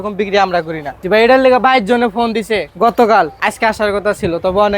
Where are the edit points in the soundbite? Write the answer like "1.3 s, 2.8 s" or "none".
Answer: 1.0 s, 2.7 s, 3.3 s